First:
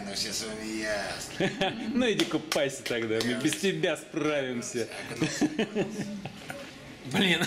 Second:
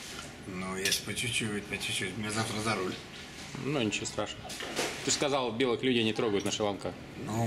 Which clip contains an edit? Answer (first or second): first